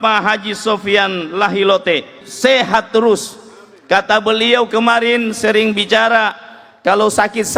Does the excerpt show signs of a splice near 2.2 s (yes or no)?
yes